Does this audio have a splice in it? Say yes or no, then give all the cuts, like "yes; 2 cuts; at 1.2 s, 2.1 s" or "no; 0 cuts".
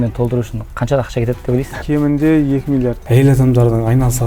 yes; 2 cuts; at 1.8 s, 3.0 s